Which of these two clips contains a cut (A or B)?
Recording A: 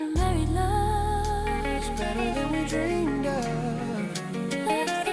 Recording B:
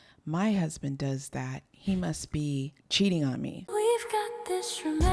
B